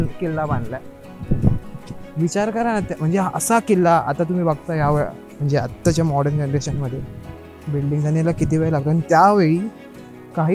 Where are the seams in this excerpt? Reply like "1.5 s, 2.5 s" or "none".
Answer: none